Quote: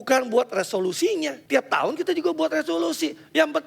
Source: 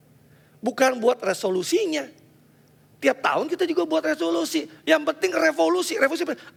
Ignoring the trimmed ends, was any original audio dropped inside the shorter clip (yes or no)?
yes